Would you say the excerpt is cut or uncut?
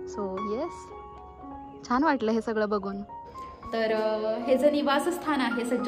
cut